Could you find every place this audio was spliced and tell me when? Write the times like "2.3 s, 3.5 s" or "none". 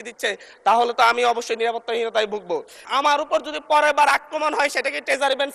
2.9 s